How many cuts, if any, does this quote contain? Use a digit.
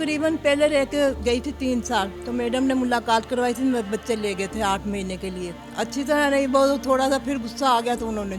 2